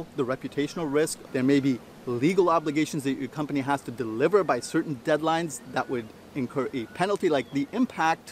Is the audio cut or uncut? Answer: cut